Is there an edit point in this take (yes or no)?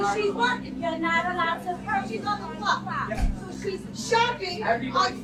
no